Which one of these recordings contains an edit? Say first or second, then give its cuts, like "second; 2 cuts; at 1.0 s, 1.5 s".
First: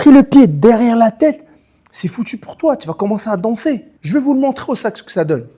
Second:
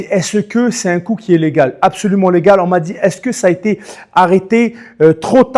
first; 1 cut; at 3.9 s